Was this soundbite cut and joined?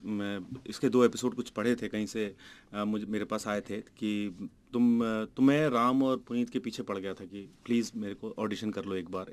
no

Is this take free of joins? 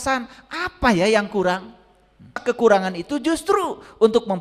no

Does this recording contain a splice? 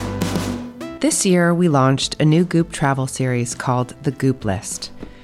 yes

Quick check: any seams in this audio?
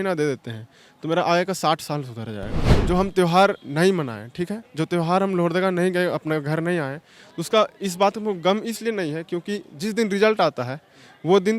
yes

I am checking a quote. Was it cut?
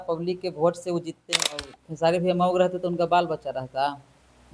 yes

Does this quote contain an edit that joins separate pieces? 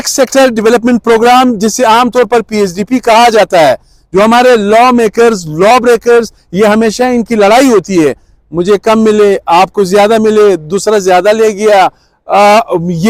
no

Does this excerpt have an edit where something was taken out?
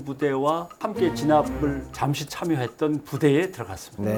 no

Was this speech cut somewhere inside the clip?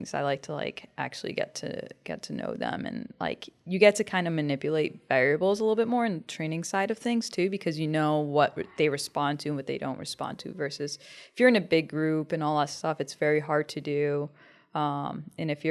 no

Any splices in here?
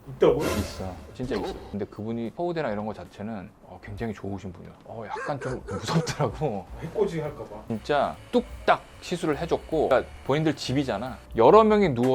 yes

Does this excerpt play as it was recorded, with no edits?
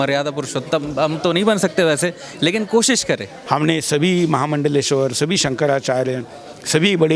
no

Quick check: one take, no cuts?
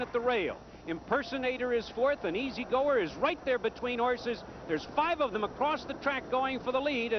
no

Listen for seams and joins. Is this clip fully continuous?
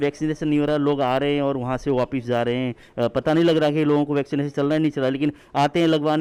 yes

